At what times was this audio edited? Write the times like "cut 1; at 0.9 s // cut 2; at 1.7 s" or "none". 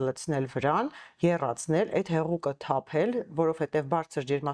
none